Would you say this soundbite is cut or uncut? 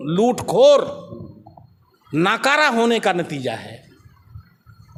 uncut